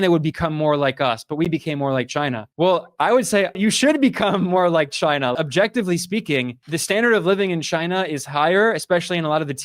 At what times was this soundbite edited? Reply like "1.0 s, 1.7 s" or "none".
3.6 s, 5.3 s